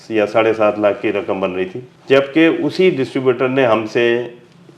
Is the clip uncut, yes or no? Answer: no